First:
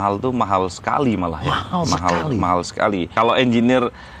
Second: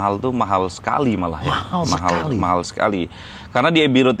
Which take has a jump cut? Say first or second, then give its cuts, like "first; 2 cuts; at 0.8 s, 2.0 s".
first; 1 cut; at 3.1 s